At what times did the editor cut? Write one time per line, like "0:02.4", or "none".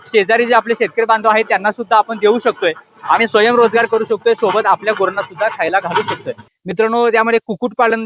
0:06.5

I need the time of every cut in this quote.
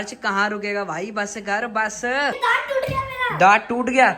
0:02.4

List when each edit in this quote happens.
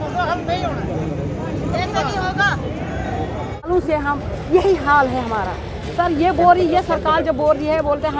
0:03.7

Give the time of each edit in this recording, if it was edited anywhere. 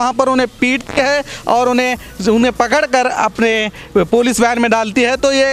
none

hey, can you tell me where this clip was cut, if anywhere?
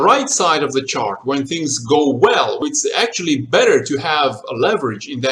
0:02.6

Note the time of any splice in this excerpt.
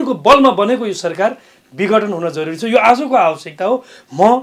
none

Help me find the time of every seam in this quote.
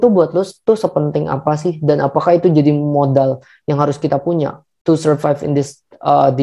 none

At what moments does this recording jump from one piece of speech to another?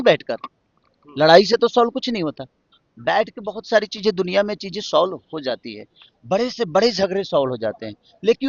none

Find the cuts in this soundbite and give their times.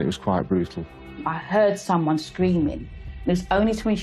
0:01.2

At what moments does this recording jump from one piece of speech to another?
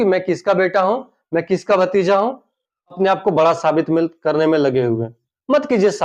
0:03.0

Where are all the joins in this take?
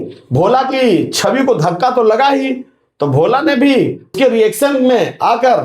0:04.1

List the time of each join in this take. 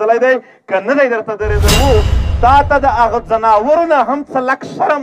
0:01.8

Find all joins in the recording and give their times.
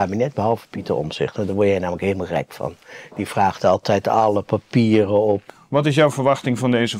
0:05.4

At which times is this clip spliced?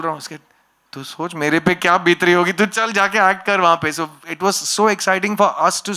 none

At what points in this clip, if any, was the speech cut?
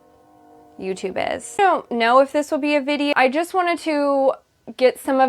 0:01.6
0:03.1

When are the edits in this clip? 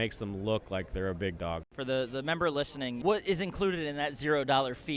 0:01.7
0:03.0

